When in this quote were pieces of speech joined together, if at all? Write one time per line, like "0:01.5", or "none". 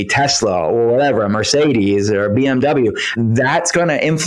0:03.2